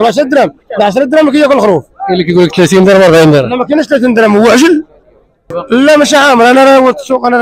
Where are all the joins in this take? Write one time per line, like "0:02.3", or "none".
0:05.5